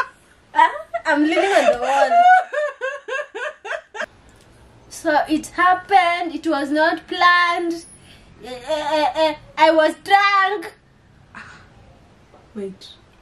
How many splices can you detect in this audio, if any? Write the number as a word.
one